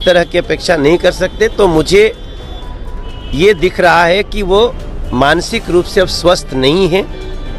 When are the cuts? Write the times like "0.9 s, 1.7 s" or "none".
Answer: none